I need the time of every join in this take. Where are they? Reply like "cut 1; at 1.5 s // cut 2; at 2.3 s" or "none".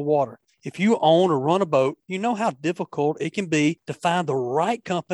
cut 1; at 2.1 s // cut 2; at 3.9 s